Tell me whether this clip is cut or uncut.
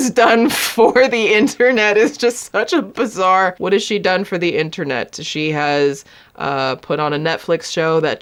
uncut